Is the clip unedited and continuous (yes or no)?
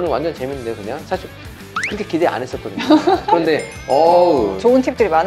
yes